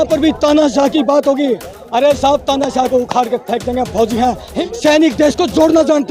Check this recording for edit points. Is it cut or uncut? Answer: cut